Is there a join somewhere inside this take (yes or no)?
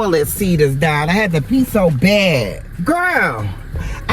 yes